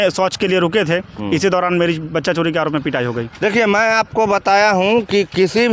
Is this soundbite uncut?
yes; 0 cuts

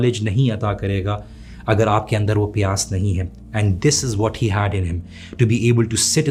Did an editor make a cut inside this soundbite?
no; 0 cuts

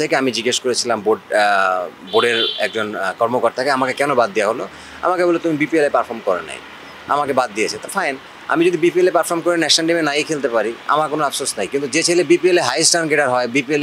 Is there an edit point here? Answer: no; 0 cuts

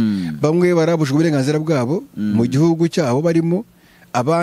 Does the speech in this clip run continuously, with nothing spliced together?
yes; 0 cuts

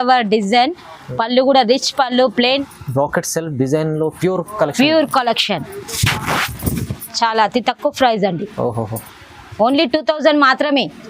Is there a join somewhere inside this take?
yes; 1 cut; at 2.6 s

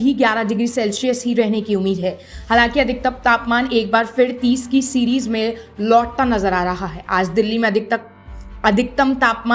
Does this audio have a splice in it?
no; 0 cuts

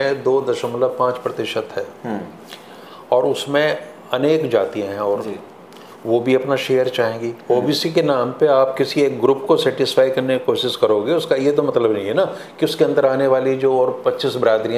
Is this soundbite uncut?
yes; 0 cuts

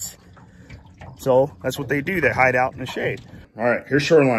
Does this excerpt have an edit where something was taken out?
yes; 1 cut; at 3.4 s

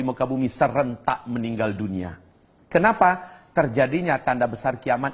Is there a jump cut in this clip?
no; 0 cuts

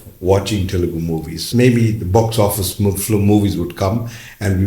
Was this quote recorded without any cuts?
no; 1 cut; at 1.5 s

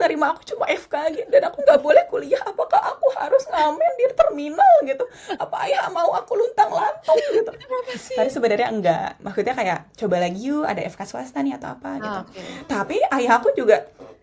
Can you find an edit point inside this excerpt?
no; 0 cuts

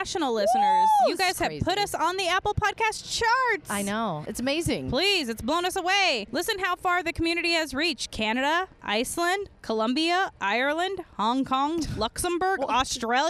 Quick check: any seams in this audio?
yes; 1 cut; at 4.3 s

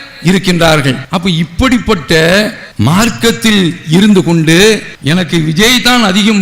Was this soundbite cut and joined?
yes; 2 cuts; at 1.1 s, 4.9 s

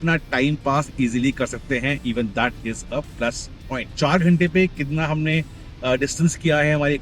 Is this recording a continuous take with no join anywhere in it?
no; 1 cut; at 3.9 s

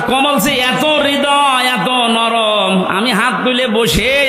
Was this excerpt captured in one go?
yes; 0 cuts

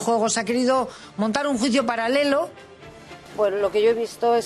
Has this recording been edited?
yes; 1 cut; at 3.0 s

